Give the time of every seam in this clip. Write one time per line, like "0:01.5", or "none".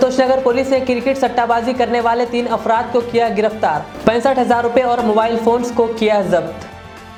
none